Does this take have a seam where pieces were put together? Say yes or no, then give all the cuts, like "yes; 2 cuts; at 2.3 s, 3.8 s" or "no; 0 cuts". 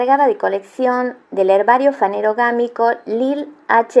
no; 0 cuts